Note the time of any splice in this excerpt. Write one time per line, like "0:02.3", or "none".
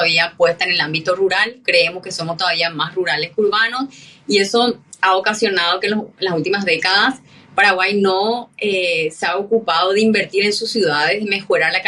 none

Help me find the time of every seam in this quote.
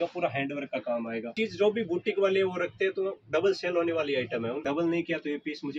0:01.3
0:04.6

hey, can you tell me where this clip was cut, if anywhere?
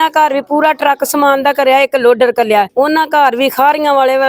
0:02.7

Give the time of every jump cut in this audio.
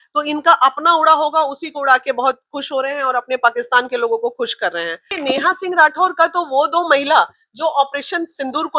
0:05.2

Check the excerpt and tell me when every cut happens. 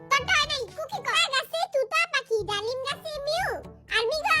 0:01.2

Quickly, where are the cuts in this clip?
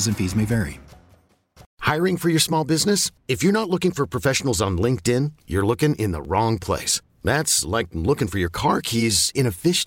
0:01.6

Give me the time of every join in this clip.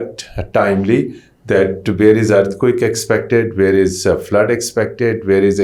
none

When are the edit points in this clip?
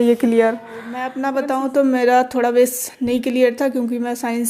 0:01.1

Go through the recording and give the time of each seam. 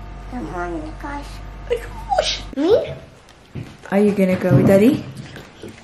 0:02.4

